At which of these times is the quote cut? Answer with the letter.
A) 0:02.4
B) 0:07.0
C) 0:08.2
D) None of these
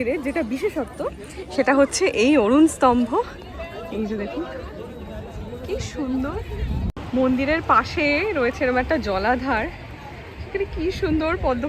B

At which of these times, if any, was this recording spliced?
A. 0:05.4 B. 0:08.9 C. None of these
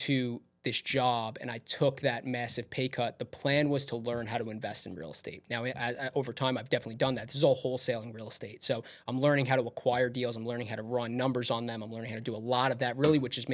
C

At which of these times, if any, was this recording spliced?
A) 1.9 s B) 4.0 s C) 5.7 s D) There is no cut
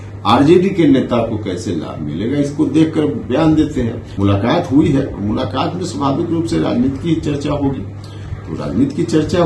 B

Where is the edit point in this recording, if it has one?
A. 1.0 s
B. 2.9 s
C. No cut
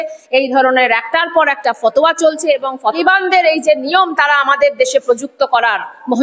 B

